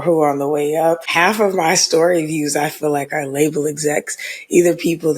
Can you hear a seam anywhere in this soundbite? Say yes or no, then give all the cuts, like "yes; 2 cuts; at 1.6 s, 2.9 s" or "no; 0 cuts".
yes; 1 cut; at 1.1 s